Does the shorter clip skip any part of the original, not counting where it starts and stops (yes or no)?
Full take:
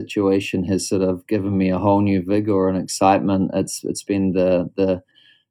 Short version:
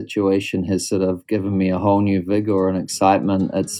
no